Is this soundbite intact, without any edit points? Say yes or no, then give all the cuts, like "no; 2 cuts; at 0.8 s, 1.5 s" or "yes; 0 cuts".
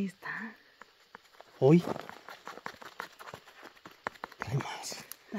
yes; 0 cuts